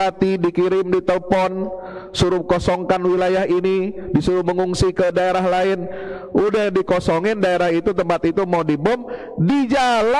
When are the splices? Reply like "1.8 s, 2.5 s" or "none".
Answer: none